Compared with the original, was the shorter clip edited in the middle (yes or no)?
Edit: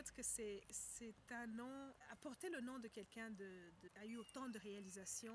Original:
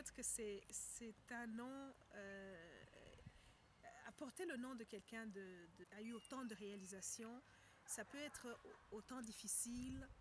yes